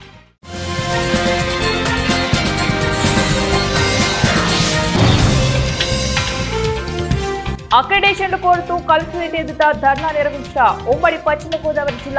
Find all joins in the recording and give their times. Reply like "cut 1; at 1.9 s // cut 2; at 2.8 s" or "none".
cut 1; at 5.8 s // cut 2; at 7.5 s

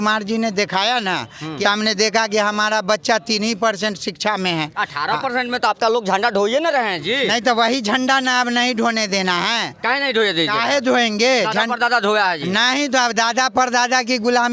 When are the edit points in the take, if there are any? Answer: cut 1; at 1.5 s

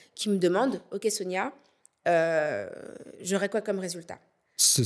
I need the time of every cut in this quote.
none

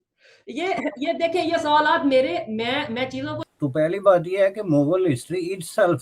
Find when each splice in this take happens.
cut 1; at 3.4 s

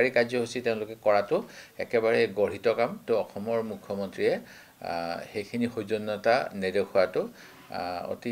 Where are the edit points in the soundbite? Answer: cut 1; at 3.0 s

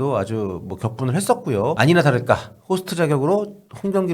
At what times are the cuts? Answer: cut 1; at 1.8 s

